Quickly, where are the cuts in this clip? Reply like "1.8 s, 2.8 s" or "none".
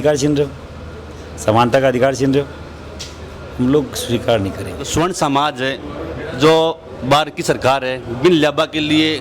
4.9 s